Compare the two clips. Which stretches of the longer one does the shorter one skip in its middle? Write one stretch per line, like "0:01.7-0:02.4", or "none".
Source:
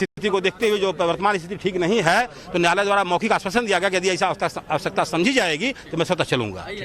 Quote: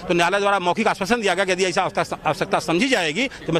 none